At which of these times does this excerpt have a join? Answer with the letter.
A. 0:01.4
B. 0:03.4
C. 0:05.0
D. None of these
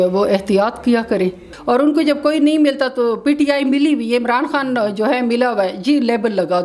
A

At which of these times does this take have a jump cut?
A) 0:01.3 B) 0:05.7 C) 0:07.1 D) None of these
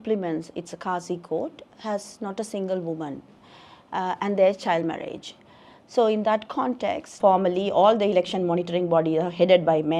C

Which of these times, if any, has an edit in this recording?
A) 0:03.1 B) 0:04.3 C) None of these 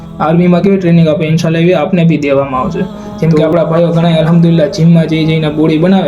A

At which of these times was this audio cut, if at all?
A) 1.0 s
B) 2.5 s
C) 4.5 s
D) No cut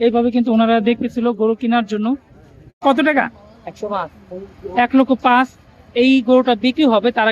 B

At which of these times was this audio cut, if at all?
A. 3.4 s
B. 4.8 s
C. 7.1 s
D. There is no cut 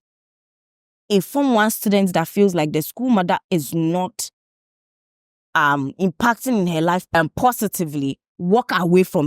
C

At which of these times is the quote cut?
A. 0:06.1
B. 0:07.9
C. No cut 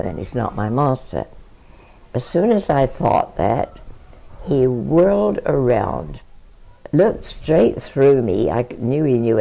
A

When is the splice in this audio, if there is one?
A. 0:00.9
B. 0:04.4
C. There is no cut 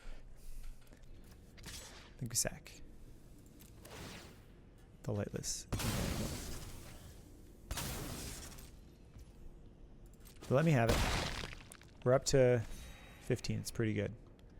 A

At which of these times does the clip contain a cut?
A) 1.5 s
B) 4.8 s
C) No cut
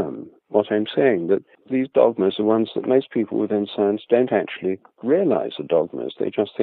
A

